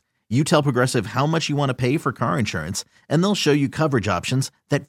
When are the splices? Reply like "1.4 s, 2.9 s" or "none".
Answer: none